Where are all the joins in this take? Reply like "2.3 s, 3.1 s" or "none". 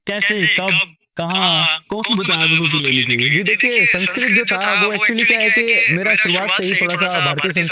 none